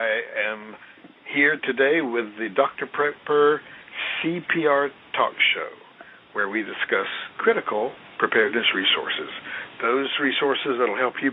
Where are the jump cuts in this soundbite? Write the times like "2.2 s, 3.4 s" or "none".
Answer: 8.4 s